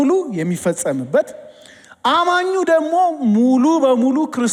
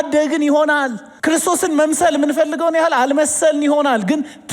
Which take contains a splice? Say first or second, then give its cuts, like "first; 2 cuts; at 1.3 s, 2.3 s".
second; 1 cut; at 1.0 s